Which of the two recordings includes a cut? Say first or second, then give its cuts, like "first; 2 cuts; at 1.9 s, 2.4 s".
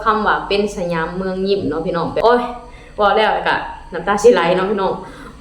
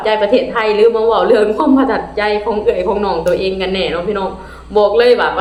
first; 1 cut; at 2.2 s